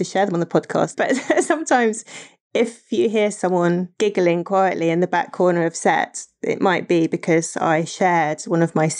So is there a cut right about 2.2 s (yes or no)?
no